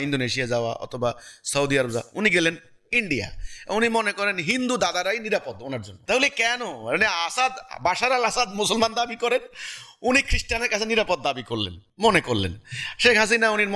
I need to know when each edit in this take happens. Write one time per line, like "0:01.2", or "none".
0:05.9
0:11.8